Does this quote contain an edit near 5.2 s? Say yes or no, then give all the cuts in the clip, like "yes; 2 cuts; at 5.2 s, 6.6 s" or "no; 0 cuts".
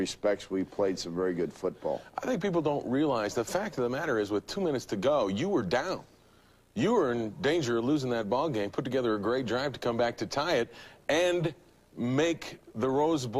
no; 1 cut; at 1.9 s